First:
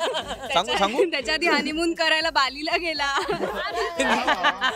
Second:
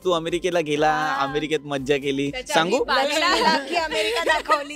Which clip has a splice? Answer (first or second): first